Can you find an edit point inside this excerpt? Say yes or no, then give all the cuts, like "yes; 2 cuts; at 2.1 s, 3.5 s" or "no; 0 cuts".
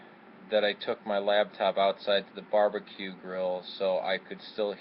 yes; 1 cut; at 3.2 s